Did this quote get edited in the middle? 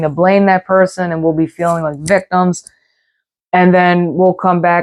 no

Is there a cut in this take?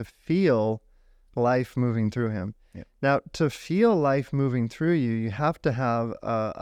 no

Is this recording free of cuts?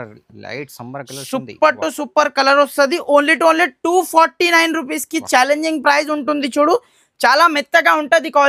yes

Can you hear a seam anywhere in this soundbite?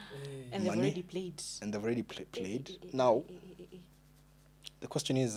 no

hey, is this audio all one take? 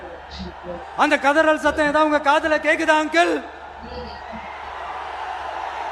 yes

